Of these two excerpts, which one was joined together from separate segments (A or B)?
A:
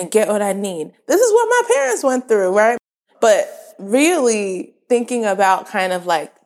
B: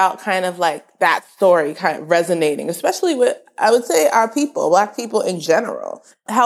A